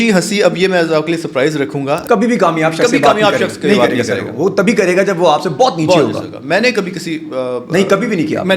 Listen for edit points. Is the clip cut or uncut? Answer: cut